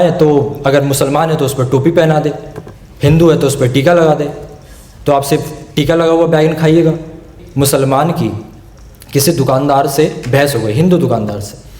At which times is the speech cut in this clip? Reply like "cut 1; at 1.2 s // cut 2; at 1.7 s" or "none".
cut 1; at 7.4 s